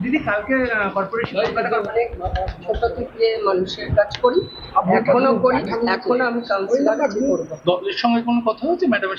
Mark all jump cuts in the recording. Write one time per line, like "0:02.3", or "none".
0:01.9